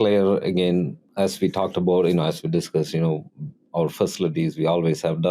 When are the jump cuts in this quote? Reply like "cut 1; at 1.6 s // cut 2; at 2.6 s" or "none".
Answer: cut 1; at 1.0 s